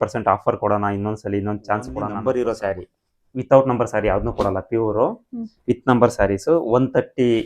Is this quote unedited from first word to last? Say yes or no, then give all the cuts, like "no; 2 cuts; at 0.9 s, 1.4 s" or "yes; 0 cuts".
no; 1 cut; at 2.0 s